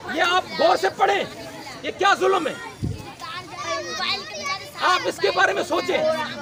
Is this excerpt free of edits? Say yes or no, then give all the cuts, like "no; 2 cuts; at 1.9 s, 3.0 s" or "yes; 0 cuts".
yes; 0 cuts